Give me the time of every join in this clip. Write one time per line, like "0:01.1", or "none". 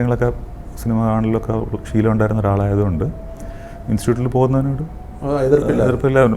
none